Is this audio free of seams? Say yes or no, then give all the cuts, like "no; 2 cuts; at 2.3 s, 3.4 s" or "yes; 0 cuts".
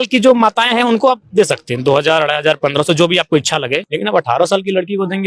no; 1 cut; at 3.9 s